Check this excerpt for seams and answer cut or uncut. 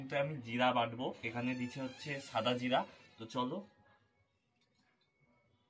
uncut